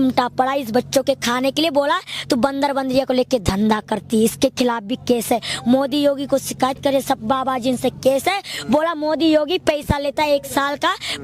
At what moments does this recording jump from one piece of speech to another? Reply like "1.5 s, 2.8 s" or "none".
none